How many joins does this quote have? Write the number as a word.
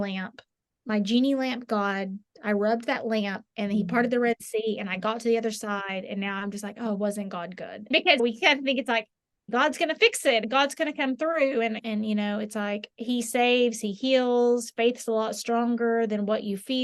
four